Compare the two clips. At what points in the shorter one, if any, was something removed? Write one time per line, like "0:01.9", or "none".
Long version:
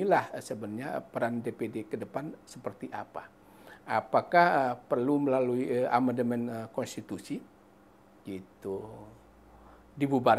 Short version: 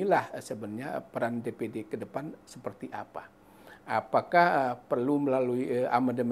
none

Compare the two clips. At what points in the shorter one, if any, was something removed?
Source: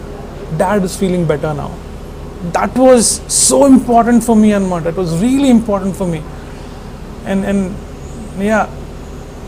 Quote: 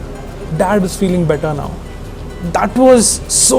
none

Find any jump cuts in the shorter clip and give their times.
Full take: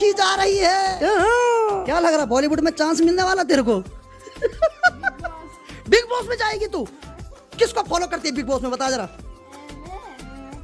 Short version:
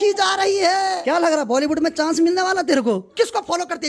0:01.0
0:03.1

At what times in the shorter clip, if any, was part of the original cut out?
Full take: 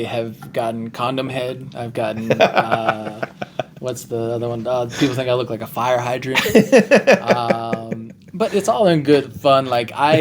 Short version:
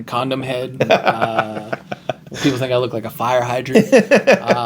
0:00.7
0:02.3
0:03.7

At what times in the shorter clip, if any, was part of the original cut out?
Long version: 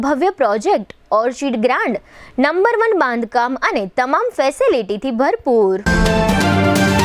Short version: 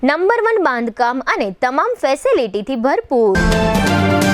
0:03.3

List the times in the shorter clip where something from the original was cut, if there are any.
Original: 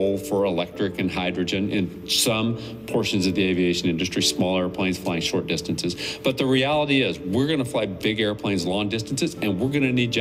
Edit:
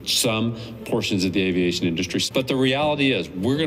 0:02.3

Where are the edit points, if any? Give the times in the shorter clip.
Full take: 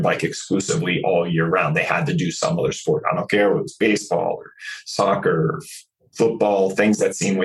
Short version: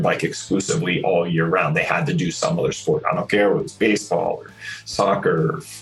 none

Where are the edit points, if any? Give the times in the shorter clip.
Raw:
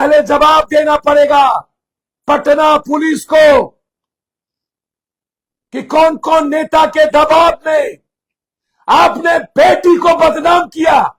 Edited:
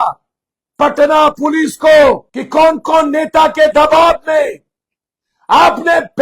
0:02.3

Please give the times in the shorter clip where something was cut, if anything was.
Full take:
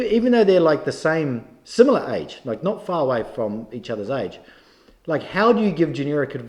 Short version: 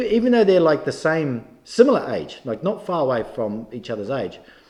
none

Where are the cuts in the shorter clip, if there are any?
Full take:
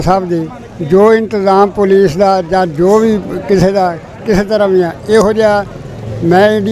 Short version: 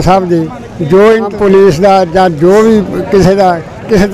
0:01.4

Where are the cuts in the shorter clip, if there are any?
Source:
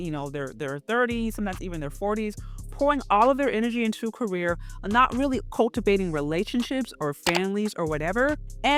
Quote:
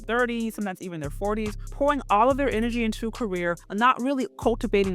0:01.6
0:03.6

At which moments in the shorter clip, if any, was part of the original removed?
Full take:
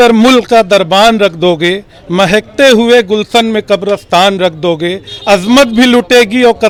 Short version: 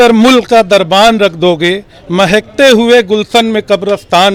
none

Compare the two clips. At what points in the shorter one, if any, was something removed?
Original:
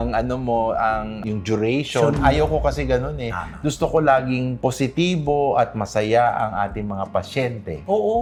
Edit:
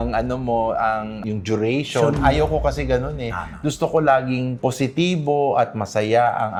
none

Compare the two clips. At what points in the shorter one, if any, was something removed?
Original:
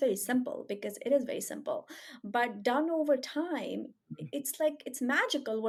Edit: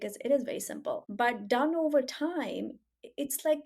0:01.1

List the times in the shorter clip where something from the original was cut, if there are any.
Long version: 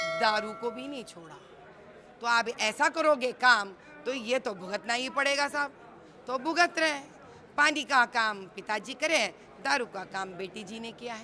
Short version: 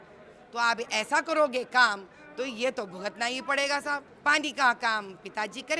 0:04.1

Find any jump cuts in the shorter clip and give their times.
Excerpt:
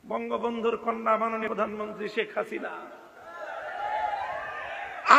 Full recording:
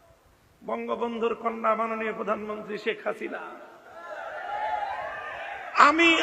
0:01.5

